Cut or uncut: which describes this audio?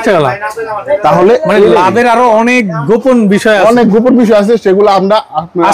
uncut